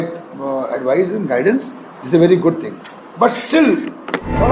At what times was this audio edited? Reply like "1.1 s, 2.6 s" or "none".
none